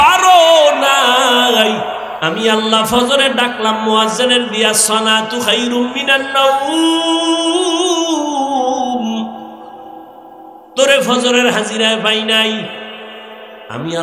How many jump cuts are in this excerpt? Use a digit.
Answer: 1